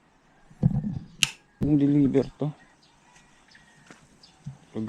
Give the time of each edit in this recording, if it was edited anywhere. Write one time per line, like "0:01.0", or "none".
0:01.6